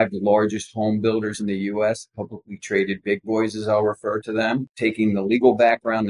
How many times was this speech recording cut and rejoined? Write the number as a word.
one